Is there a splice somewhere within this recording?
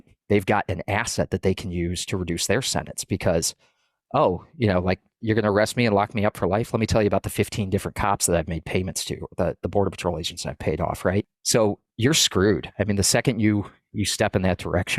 yes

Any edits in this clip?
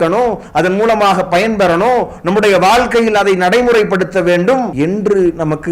yes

